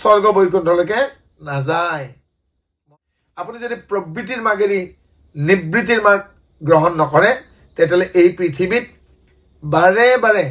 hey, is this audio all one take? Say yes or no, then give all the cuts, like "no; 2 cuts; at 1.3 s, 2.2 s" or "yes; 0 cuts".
no; 1 cut; at 2.8 s